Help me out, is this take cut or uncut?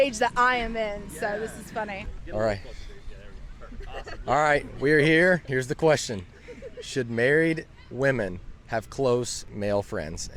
uncut